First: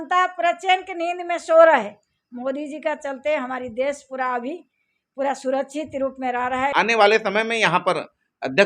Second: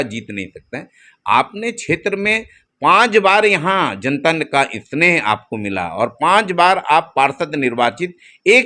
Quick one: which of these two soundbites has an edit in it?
first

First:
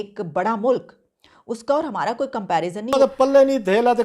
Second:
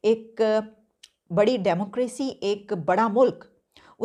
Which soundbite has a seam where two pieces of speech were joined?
first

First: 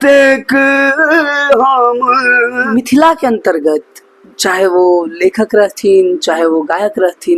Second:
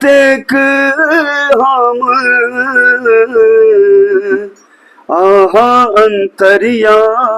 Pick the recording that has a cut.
first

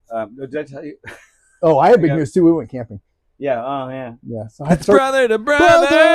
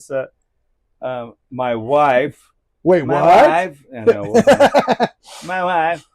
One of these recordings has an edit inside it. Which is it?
first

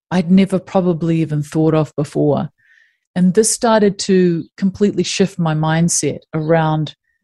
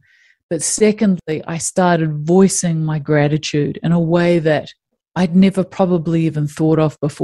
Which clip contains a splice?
second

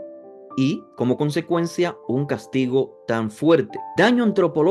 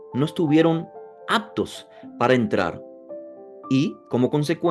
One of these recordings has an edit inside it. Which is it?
first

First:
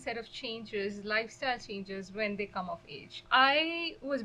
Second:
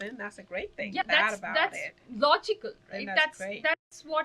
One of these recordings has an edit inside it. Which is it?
second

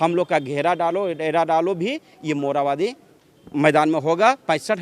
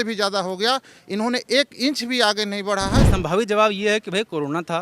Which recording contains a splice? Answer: second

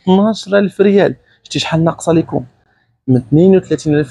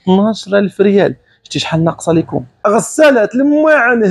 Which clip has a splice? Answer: second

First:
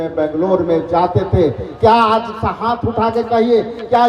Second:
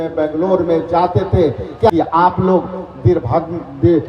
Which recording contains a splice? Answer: second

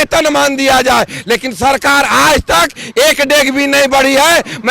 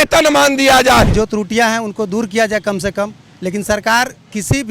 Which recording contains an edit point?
second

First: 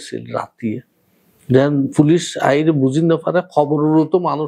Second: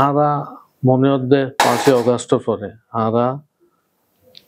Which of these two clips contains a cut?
second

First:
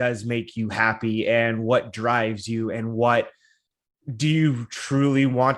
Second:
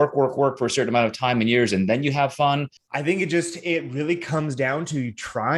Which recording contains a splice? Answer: second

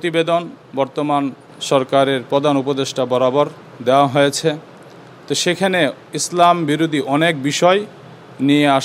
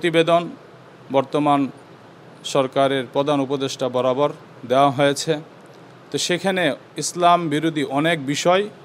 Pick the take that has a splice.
first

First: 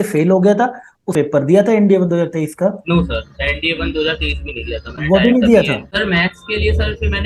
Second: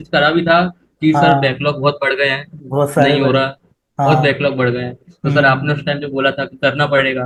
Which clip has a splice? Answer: first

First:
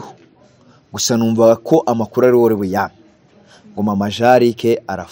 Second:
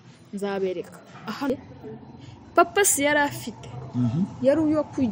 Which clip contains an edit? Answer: second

